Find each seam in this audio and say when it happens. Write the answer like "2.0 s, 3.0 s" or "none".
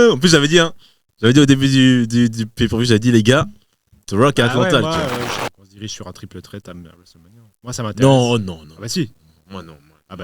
5.4 s